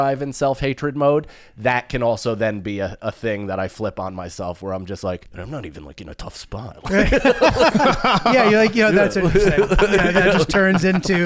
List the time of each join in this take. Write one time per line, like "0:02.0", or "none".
0:05.3